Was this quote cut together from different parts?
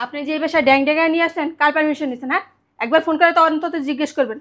no; 0 cuts

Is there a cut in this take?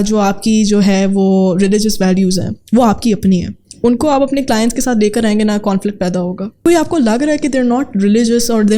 yes; 1 cut; at 6.6 s

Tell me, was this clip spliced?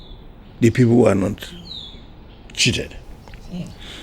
no; 0 cuts

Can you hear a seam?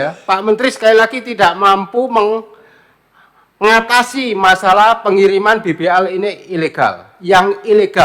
no; 0 cuts

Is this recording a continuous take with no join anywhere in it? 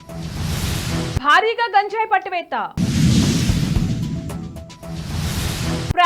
no; 1 cut; at 1.1 s

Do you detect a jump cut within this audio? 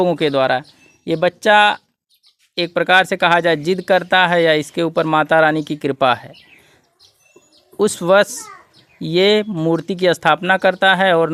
no; 0 cuts

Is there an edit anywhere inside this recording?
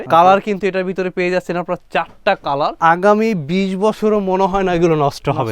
yes; 1 cut; at 2.8 s

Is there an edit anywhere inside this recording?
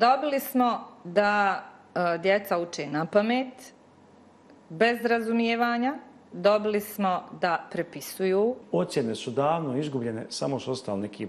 yes; 1 cut; at 8.6 s

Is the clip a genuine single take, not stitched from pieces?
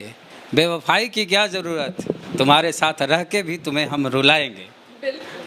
yes; 0 cuts

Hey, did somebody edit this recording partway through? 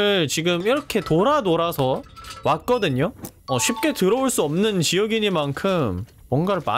yes; 1 cut; at 3.3 s

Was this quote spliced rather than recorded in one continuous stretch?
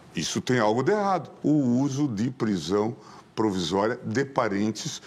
yes; 1 cut; at 1.3 s

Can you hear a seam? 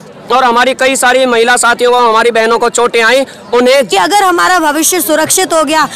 yes; 1 cut; at 3.9 s

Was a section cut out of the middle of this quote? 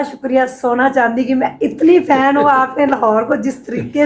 no; 0 cuts

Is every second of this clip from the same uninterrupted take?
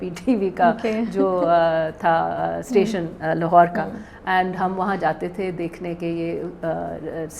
yes; 0 cuts

